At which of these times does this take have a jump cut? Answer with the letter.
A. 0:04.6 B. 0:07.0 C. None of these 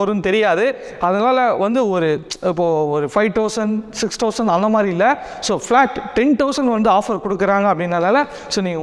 C